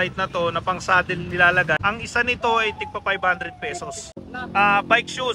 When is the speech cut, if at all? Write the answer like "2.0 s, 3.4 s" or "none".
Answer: 1.8 s, 4.2 s